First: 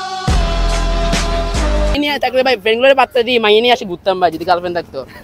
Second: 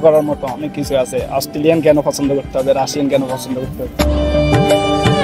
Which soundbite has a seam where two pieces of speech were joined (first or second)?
first